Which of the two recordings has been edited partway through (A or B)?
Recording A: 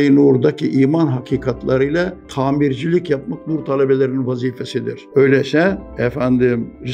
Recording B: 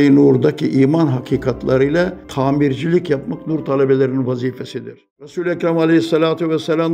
B